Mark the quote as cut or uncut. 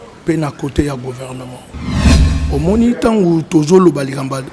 cut